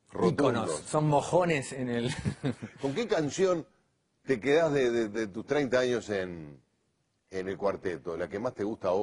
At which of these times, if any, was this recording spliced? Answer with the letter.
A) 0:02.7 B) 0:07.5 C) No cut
A